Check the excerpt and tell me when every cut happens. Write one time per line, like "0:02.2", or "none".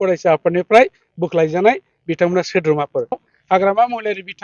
0:03.2